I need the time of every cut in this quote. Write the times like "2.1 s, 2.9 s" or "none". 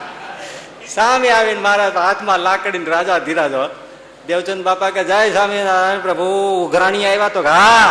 none